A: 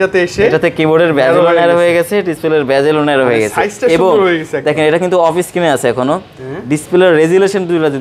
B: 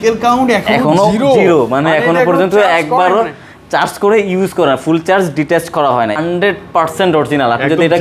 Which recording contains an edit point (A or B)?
B